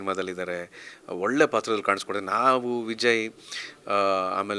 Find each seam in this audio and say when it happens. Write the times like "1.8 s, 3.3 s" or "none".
none